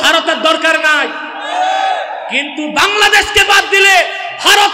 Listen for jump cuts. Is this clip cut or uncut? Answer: uncut